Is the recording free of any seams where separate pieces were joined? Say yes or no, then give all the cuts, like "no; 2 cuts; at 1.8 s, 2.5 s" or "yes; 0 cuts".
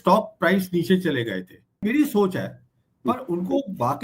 no; 1 cut; at 1.8 s